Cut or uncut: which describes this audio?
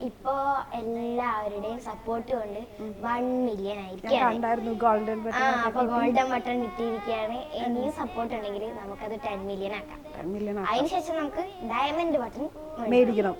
uncut